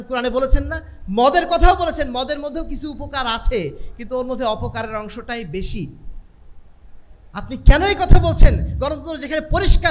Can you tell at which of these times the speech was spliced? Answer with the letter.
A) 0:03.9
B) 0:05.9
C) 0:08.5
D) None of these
D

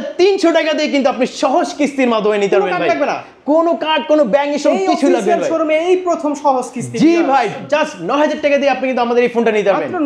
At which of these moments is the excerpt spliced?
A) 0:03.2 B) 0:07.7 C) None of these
B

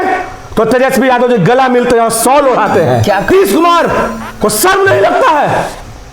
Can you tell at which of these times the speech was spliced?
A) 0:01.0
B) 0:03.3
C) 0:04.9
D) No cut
B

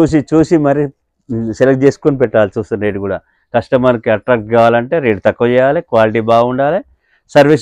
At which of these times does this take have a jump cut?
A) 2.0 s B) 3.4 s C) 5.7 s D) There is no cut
D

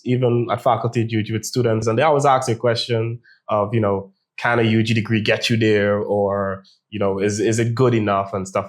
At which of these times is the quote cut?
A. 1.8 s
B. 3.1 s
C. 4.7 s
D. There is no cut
A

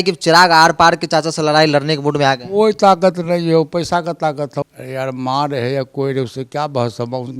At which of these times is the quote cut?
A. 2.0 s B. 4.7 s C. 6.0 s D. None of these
B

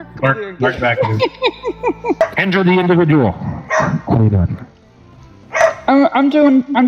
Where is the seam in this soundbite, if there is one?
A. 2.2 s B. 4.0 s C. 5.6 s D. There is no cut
A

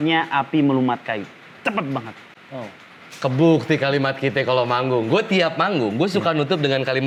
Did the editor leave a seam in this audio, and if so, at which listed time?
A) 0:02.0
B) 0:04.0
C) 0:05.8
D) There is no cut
D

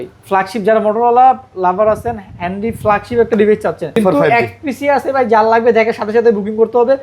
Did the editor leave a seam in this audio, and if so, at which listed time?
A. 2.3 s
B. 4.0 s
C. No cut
B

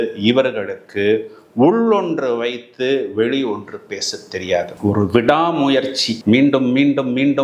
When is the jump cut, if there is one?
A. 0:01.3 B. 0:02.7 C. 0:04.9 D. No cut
D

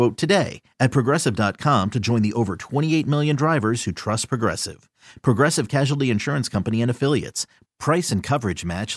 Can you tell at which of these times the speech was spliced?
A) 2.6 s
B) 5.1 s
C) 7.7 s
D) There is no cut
D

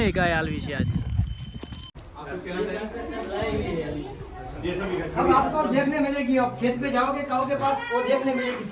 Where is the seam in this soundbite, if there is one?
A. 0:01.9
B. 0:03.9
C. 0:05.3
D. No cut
A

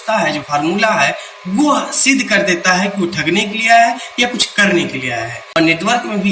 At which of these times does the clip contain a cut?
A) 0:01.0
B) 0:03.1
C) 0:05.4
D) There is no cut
C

